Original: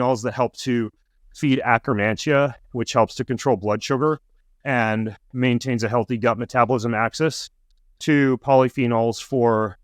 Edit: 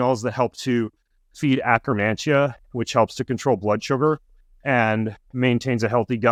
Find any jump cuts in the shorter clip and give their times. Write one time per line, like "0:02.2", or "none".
none